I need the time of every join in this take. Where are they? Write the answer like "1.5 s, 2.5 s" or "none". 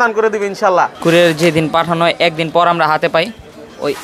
0.9 s